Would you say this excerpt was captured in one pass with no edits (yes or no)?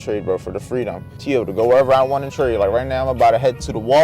no